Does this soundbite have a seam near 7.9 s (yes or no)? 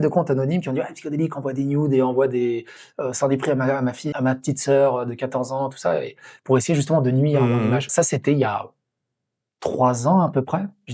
yes